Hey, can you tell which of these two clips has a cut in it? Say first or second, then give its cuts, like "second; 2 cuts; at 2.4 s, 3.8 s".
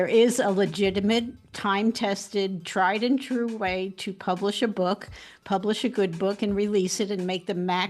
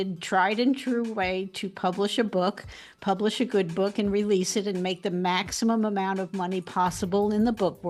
first; 1 cut; at 1.4 s